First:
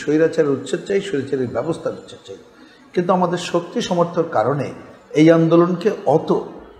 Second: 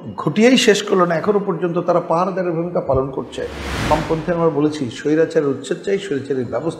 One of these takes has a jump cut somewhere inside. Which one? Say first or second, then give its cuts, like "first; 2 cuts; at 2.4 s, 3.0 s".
second; 1 cut; at 3.8 s